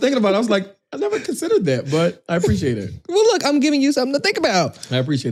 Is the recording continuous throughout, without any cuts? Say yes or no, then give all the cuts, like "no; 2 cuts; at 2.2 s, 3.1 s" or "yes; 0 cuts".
yes; 0 cuts